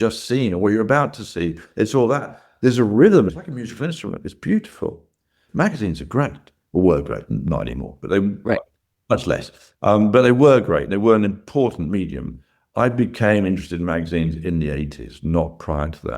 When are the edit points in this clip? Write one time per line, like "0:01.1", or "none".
0:03.3
0:05.4